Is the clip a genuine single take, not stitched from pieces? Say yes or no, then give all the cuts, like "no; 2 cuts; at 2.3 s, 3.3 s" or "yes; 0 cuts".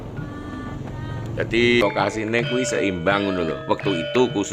no; 1 cut; at 1.8 s